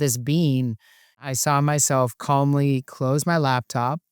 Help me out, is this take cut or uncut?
cut